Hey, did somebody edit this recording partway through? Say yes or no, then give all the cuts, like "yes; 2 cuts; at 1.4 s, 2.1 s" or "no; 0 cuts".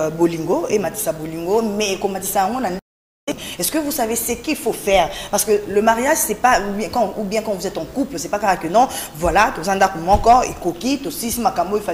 no; 0 cuts